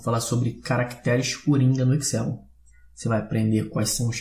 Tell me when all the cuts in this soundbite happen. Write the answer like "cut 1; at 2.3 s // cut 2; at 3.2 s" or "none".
cut 1; at 2.2 s